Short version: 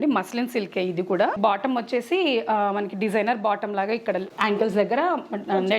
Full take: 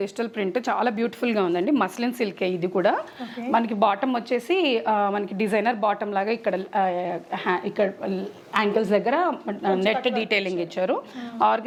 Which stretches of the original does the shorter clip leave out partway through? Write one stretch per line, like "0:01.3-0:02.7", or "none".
0:03.0-0:03.8
0:06.7-0:08.4